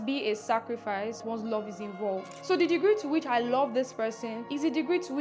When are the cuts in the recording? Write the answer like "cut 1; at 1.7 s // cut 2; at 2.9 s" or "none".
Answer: cut 1; at 1.2 s // cut 2; at 2.4 s